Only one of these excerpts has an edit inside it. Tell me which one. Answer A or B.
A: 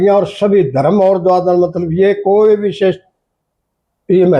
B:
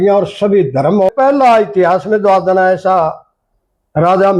B